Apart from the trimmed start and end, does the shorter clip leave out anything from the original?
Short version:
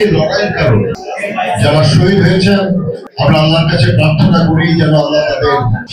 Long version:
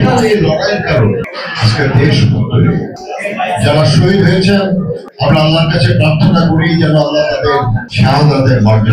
yes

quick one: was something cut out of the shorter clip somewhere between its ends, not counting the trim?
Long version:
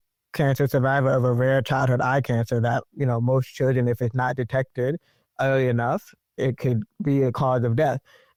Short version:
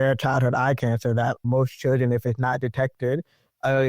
yes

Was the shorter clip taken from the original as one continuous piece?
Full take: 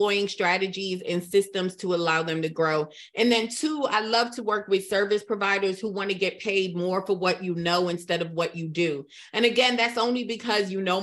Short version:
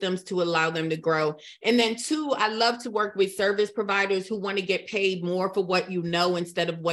yes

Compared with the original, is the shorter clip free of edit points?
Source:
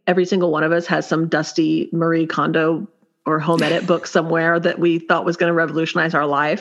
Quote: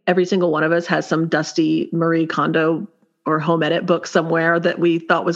yes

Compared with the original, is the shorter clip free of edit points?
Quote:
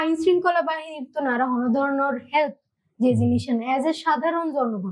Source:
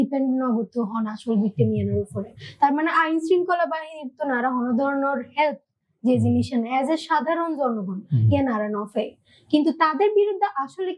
yes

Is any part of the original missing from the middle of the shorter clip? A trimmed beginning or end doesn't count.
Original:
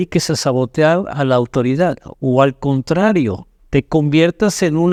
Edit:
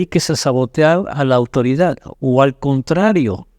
no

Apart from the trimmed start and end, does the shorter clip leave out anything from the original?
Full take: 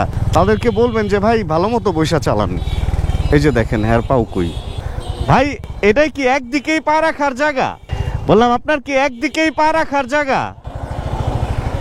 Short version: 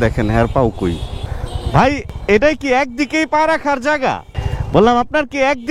no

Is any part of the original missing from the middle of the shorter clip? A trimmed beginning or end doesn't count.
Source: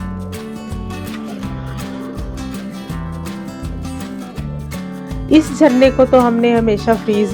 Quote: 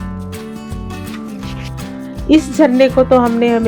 yes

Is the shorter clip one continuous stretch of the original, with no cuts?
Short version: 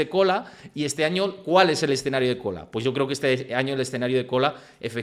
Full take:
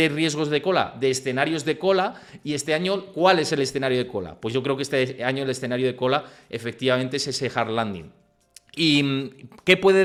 yes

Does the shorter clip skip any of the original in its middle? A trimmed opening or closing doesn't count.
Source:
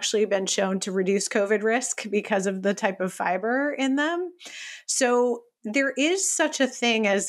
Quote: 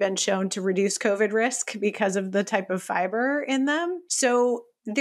yes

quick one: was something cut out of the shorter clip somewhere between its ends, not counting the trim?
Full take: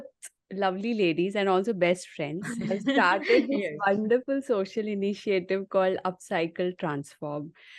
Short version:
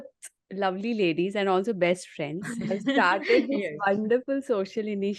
no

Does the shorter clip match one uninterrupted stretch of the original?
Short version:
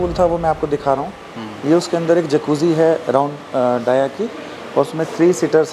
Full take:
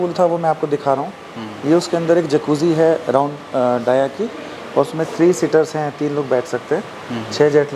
yes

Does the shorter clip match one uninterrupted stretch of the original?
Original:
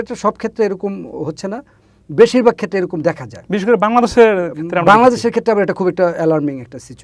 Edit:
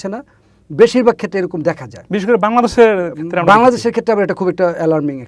yes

